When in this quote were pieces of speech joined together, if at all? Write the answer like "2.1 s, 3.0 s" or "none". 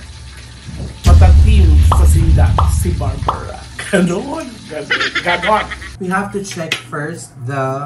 6.0 s

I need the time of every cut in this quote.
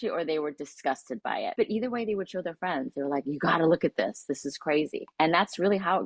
1.5 s, 5.0 s

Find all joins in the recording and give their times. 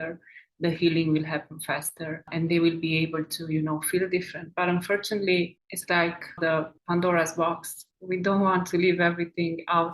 2.3 s, 6.4 s

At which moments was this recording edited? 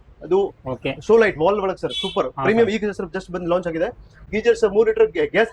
4.2 s

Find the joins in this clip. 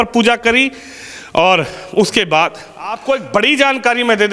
3.0 s

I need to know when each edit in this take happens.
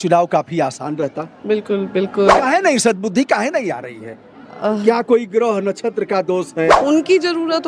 2.4 s, 6.8 s

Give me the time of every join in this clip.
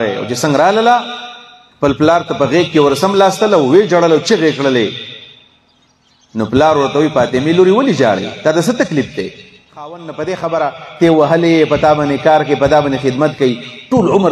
10.0 s

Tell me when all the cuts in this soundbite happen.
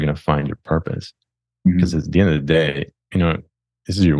2.9 s

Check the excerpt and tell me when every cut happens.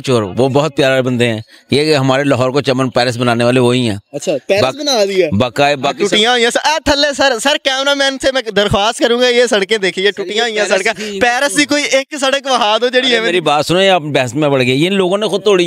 none

